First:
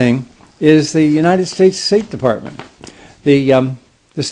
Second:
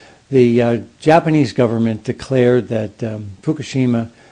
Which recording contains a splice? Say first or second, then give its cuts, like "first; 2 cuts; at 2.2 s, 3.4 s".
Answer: second; 1 cut; at 1.1 s